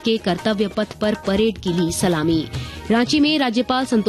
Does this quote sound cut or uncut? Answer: uncut